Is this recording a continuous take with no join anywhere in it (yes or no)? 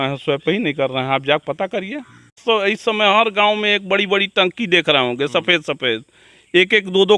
no